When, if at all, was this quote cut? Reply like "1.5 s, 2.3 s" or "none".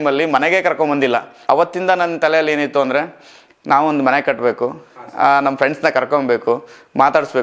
1.3 s